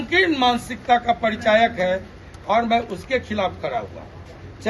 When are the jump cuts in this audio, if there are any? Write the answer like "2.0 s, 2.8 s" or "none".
none

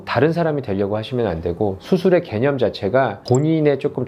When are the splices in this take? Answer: none

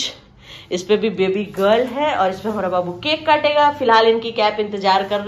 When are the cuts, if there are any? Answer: none

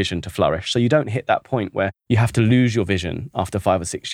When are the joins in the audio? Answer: 2.0 s

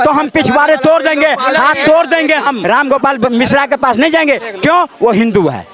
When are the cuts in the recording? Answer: 2.6 s

